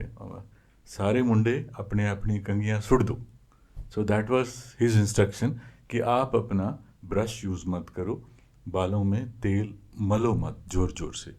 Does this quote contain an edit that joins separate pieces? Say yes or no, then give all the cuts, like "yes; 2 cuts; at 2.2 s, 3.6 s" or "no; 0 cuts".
no; 0 cuts